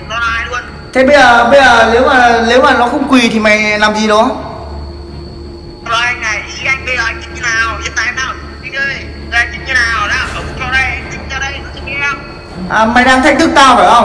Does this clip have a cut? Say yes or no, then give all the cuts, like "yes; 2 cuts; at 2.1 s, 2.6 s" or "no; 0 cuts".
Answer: no; 0 cuts